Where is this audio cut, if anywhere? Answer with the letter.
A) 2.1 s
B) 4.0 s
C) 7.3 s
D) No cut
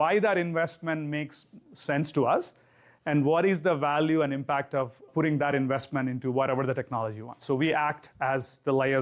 D